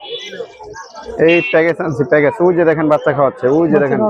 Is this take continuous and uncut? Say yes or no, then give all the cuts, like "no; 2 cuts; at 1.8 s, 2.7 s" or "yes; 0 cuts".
yes; 0 cuts